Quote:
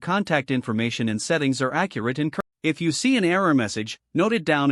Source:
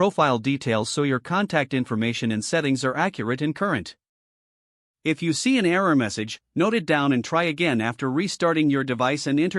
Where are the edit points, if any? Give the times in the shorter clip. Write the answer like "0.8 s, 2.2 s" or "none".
2.4 s